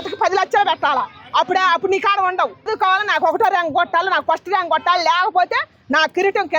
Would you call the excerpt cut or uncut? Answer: cut